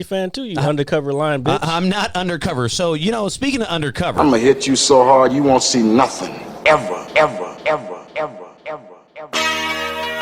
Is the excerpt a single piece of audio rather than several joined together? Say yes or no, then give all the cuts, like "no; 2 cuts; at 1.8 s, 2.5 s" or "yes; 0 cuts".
no; 1 cut; at 4.1 s